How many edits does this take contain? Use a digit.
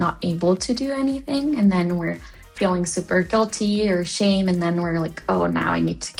0